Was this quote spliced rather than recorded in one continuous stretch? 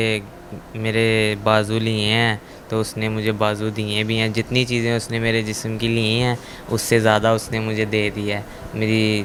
no; 0 cuts

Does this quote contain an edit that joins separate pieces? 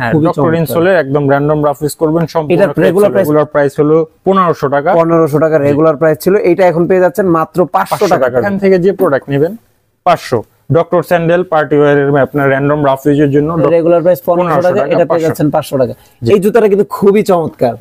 yes; 3 cuts; at 3.3 s, 8.5 s, 13.7 s

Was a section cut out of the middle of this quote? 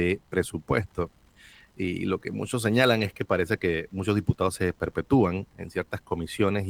no; 0 cuts

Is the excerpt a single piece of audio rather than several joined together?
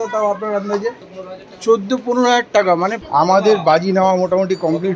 no; 2 cuts; at 1.1 s, 3.0 s

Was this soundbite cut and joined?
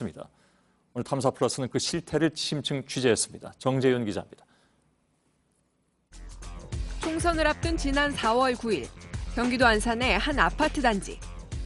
no; 0 cuts

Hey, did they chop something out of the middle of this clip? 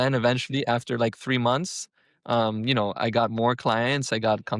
no; 0 cuts

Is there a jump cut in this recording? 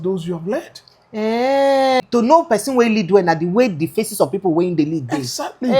yes; 1 cut; at 2.0 s

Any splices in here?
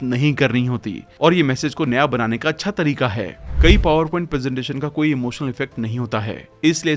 yes; 1 cut; at 3.4 s

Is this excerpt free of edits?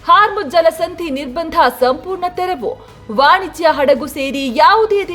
yes; 0 cuts

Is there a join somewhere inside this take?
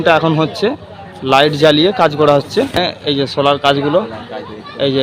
yes; 1 cut; at 3.0 s

